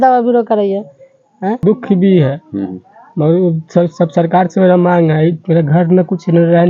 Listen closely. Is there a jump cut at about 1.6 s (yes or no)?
yes